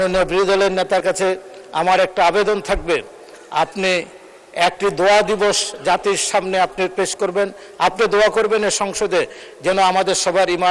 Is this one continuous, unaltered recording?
yes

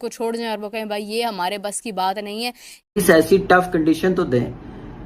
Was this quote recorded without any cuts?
no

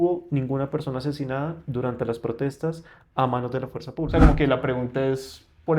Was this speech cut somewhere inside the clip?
yes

